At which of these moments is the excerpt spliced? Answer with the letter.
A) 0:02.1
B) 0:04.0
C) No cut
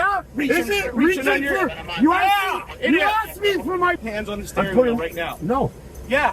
B